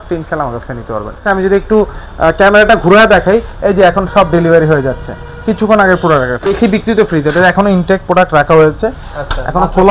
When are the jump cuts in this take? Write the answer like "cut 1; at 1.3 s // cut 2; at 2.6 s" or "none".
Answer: cut 1; at 1.2 s // cut 2; at 6.5 s